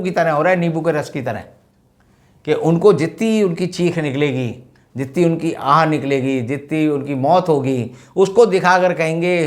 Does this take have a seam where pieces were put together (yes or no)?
no